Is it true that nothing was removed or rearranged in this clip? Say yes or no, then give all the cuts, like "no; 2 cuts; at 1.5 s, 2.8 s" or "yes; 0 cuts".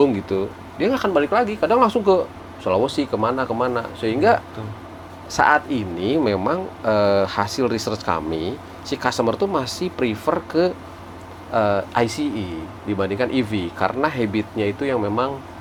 yes; 0 cuts